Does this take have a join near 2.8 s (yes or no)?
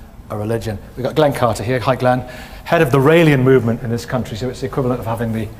no